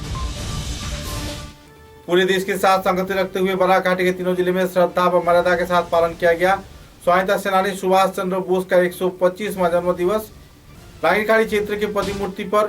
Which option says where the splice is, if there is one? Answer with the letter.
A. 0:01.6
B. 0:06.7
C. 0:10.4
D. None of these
A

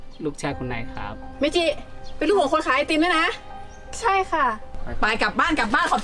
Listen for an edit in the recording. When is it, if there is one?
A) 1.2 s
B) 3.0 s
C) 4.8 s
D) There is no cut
A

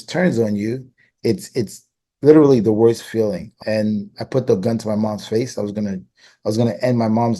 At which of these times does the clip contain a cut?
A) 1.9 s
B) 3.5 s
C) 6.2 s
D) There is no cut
B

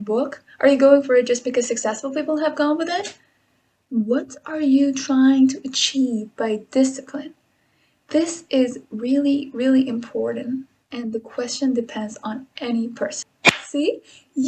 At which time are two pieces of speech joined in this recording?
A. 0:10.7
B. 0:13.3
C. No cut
B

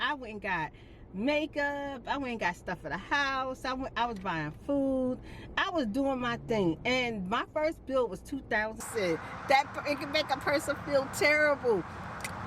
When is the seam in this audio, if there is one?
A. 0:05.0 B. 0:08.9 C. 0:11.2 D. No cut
B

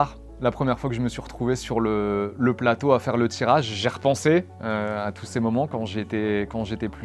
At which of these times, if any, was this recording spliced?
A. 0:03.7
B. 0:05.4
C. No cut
C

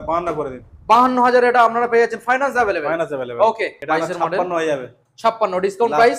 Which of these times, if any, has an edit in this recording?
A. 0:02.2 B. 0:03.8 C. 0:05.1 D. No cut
B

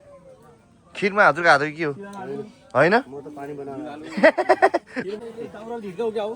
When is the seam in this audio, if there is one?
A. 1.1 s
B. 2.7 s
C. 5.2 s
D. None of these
C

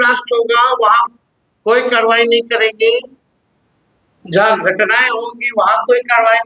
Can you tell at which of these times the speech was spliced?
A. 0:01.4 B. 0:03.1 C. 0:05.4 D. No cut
D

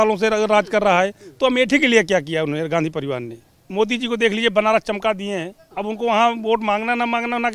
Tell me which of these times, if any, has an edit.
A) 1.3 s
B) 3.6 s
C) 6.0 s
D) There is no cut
B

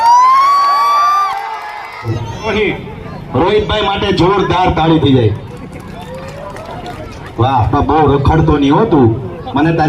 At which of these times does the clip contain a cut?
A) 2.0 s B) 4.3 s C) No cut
A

